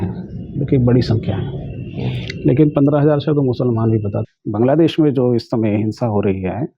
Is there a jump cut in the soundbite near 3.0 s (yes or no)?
no